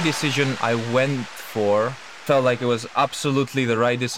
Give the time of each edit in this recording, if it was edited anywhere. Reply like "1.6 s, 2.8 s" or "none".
2.1 s